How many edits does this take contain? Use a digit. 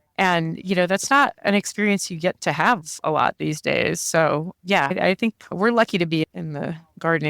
1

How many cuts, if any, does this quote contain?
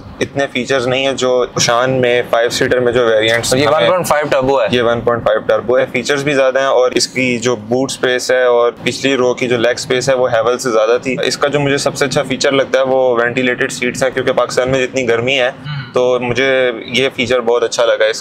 5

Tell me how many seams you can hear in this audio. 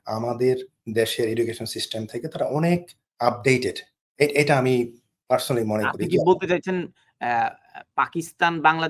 0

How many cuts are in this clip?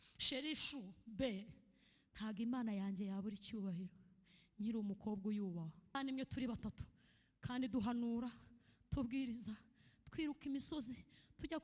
1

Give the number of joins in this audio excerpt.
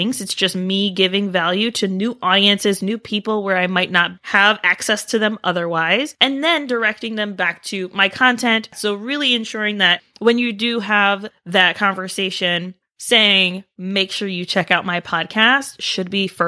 2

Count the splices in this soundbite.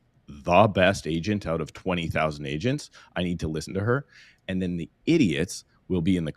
0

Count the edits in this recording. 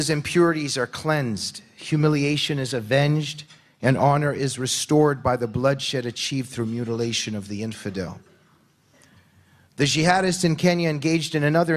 0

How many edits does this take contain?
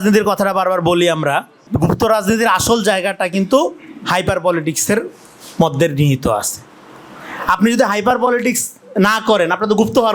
0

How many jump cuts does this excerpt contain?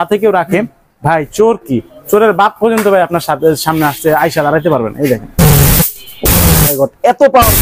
0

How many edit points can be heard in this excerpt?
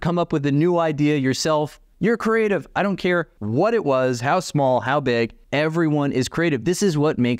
3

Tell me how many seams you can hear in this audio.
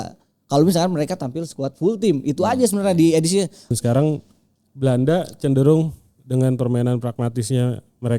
1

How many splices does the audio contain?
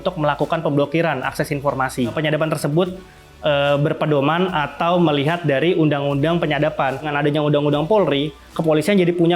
2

